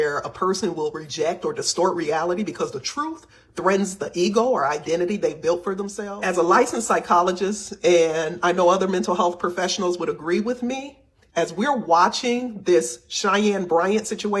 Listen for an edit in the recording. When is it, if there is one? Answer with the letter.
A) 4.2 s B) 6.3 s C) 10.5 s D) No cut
D